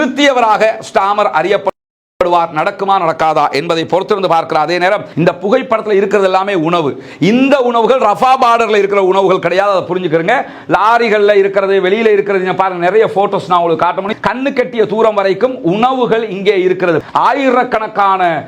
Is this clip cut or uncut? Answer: cut